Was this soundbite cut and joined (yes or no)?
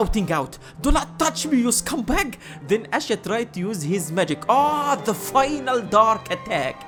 no